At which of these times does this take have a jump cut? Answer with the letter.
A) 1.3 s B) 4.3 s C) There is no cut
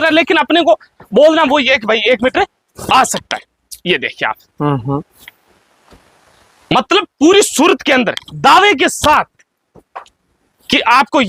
C